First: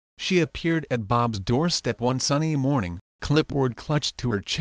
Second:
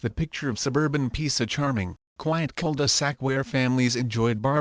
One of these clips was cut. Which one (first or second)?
first